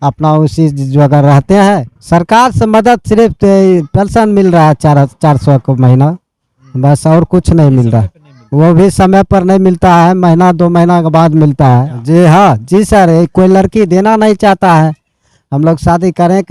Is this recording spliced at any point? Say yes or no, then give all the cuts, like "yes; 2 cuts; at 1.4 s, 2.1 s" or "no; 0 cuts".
yes; 2 cuts; at 1.9 s, 11.9 s